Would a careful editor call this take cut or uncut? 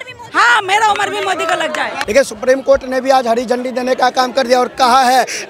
cut